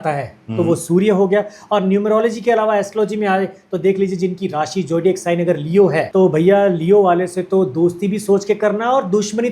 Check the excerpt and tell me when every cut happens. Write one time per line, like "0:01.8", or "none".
0:06.1